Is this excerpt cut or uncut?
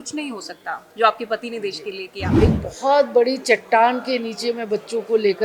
cut